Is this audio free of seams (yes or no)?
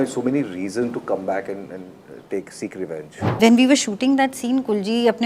no